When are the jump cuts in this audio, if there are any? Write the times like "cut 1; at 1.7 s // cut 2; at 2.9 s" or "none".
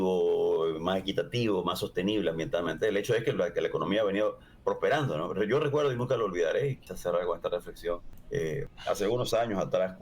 cut 1; at 6.9 s // cut 2; at 8.5 s